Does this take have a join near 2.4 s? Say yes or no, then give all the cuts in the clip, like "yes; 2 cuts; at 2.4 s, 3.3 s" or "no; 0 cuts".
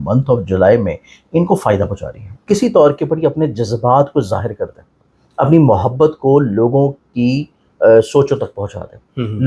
yes; 1 cut; at 2.4 s